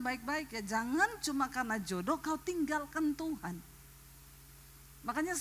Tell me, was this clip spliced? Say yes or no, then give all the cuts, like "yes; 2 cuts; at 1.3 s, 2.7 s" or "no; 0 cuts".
no; 0 cuts